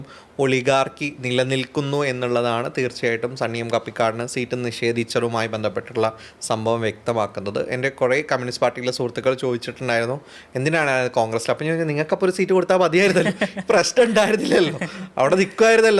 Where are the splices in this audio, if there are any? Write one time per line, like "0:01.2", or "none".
none